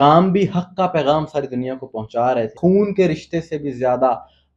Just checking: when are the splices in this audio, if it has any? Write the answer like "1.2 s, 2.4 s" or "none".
2.6 s